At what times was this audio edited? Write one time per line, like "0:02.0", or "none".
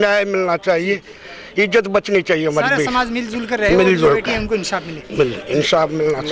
none